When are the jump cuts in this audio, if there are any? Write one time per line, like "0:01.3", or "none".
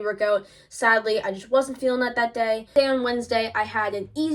0:02.7